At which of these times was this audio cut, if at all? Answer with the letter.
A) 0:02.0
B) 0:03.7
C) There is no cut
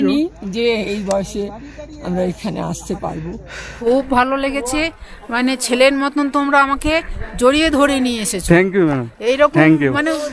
B